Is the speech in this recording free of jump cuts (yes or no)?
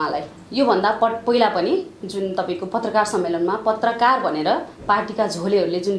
yes